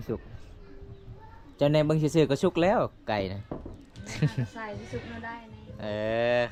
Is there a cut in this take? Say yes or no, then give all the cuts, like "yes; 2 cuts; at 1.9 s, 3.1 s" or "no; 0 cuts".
no; 0 cuts